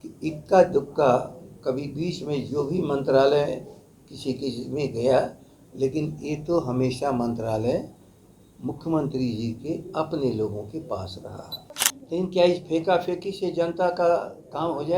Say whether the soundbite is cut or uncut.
cut